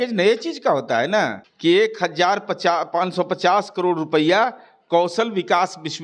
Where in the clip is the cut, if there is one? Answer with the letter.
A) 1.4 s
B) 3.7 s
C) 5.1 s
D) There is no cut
A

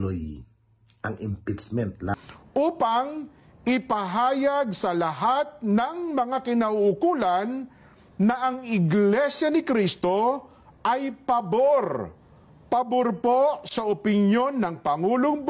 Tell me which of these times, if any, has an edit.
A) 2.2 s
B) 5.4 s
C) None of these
A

